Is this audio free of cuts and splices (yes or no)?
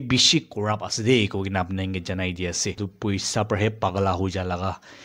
no